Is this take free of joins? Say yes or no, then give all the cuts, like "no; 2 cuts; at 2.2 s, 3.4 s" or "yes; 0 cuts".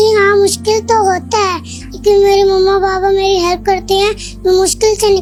yes; 0 cuts